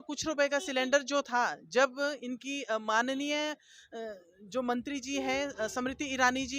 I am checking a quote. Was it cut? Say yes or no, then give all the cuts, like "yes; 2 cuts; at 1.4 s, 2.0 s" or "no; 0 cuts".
no; 0 cuts